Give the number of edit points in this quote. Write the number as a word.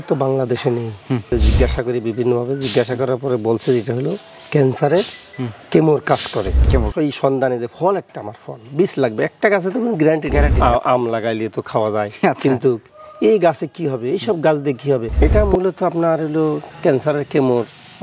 four